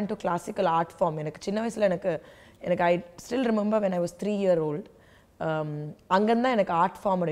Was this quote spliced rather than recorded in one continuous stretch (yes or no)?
no